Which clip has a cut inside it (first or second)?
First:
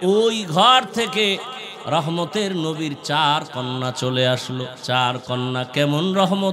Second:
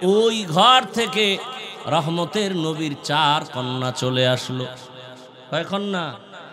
first